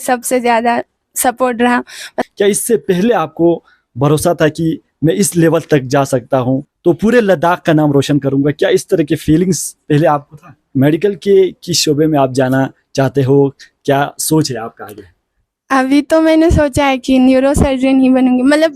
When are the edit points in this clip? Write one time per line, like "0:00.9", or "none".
0:02.2
0:06.7
0:10.6